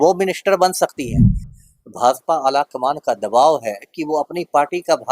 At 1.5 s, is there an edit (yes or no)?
yes